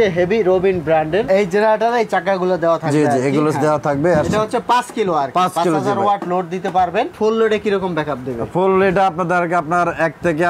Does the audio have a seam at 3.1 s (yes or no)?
no